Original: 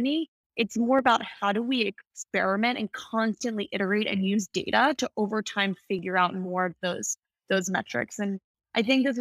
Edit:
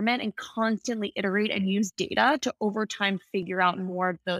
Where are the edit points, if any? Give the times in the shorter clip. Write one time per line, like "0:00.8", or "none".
none

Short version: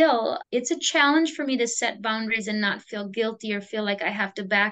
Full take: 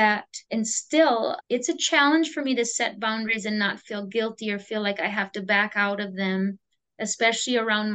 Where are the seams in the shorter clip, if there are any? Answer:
none

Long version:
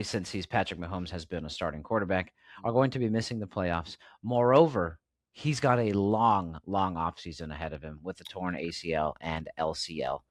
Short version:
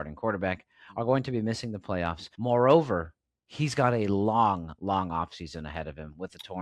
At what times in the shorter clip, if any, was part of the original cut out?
0:02.2

